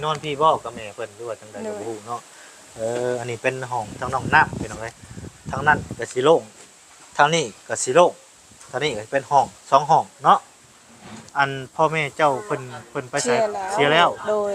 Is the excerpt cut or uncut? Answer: cut